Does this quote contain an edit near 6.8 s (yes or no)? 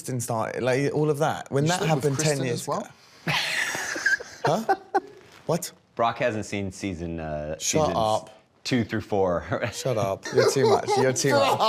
no